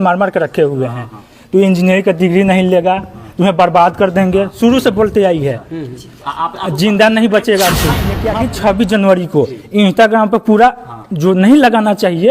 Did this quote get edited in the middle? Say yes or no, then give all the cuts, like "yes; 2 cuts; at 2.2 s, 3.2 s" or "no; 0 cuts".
yes; 1 cut; at 8.1 s